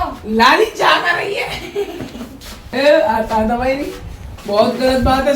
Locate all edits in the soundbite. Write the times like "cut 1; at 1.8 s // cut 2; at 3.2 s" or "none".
cut 1; at 2.6 s